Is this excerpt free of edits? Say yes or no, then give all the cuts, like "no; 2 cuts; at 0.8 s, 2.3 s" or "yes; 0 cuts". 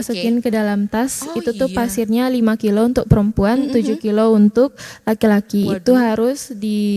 yes; 0 cuts